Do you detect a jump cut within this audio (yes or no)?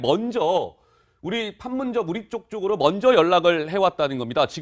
yes